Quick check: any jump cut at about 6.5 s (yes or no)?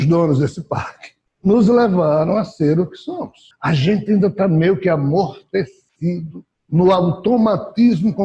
no